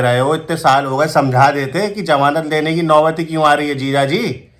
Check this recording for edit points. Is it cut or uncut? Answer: uncut